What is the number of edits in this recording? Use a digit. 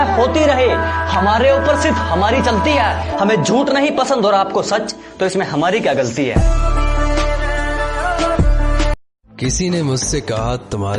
1